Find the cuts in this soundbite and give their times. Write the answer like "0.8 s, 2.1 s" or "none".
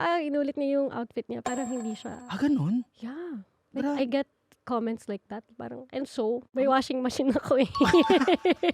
none